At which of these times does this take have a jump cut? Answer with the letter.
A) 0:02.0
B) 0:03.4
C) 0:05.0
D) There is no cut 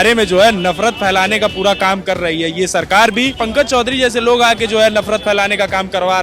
B